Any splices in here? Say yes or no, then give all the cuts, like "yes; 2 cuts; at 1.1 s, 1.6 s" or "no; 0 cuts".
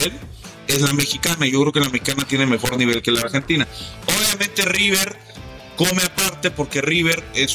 no; 0 cuts